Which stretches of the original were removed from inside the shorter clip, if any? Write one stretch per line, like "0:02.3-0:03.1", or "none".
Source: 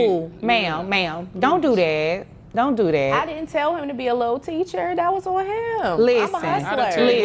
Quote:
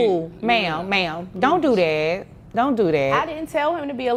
none